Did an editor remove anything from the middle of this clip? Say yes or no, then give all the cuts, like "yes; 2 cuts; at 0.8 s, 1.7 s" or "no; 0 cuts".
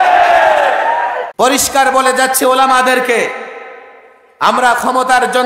yes; 1 cut; at 1.2 s